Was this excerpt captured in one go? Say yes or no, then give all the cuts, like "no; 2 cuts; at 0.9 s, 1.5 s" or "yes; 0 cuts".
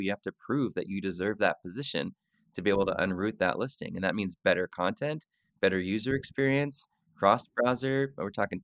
yes; 0 cuts